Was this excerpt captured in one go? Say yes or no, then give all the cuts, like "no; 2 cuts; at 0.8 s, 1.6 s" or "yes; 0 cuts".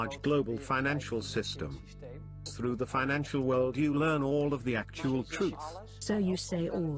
yes; 0 cuts